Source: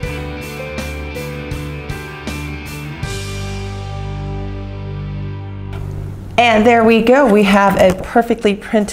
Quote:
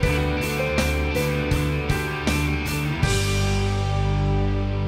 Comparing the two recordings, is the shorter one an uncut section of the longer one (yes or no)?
yes